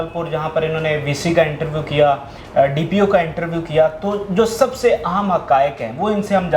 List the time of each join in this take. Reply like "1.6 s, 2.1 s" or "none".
none